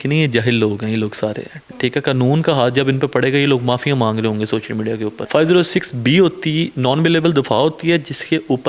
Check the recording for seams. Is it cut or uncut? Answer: cut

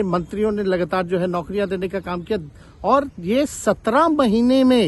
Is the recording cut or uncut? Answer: uncut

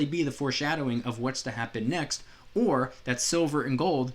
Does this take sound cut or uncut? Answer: uncut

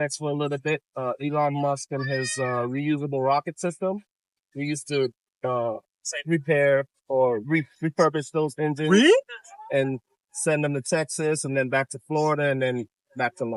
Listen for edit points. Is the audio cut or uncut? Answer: uncut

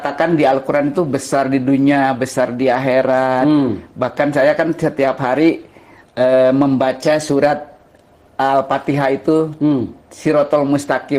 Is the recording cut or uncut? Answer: uncut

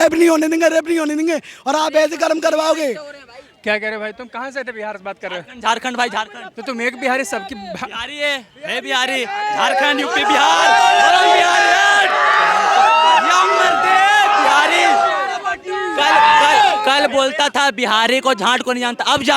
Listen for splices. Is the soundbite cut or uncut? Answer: uncut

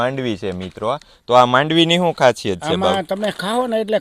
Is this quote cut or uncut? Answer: uncut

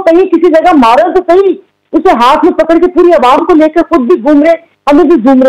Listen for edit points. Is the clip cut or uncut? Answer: uncut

